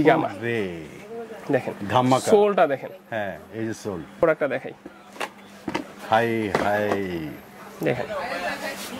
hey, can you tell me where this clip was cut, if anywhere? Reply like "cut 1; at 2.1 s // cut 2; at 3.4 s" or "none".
cut 1; at 4.2 s